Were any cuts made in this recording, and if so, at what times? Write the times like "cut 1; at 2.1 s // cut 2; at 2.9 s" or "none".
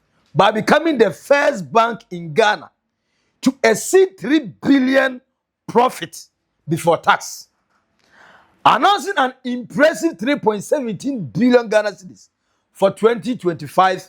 none